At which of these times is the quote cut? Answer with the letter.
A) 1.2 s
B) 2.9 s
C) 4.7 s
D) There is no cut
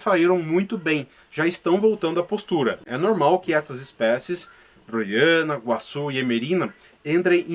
D